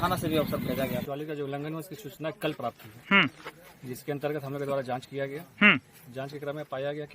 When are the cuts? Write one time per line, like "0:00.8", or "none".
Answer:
0:01.0